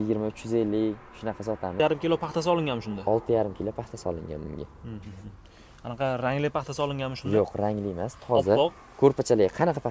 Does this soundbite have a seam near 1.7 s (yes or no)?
yes